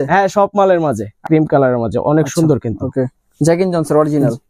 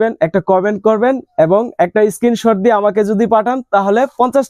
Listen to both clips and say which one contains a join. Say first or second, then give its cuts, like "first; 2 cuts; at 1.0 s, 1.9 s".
first; 1 cut; at 1.1 s